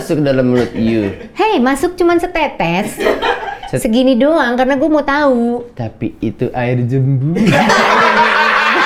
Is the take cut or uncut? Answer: uncut